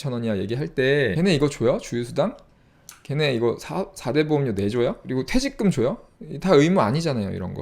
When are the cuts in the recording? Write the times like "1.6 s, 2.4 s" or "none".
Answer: 1.1 s, 5.0 s